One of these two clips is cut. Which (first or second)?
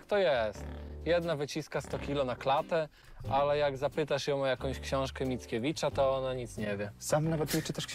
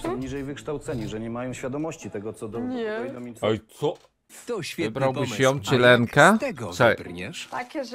second